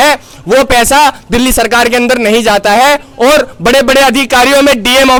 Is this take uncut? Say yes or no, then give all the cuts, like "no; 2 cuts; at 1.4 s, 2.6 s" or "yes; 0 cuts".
yes; 0 cuts